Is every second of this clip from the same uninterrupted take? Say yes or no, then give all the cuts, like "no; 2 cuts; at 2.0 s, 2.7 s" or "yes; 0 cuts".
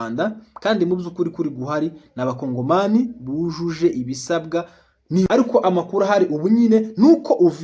no; 1 cut; at 5.3 s